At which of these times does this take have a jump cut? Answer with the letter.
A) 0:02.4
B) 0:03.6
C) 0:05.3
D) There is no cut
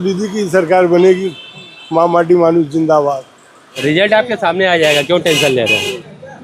B